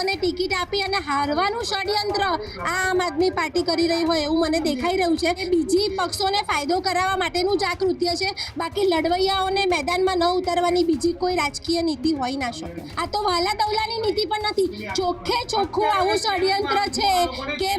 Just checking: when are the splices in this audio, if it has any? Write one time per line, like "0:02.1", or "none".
0:05.4
0:12.9